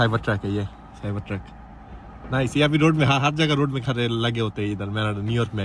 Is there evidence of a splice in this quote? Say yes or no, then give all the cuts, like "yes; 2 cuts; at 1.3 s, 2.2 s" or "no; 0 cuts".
no; 0 cuts